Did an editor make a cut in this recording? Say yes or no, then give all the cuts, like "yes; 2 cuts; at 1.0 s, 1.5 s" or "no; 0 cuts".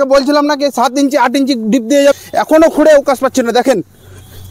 yes; 1 cut; at 2.0 s